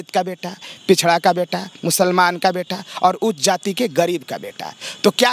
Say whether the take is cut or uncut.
uncut